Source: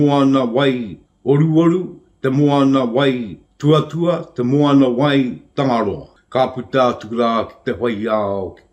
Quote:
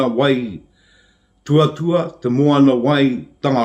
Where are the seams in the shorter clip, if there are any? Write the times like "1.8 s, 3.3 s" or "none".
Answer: 0.9 s